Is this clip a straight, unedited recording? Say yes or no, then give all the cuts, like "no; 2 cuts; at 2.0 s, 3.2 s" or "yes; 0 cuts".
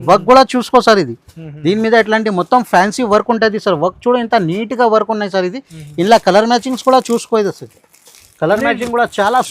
yes; 0 cuts